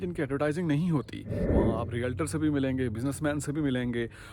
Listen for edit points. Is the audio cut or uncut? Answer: cut